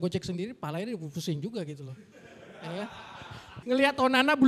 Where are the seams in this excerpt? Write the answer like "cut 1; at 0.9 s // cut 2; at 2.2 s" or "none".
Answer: cut 1; at 3.5 s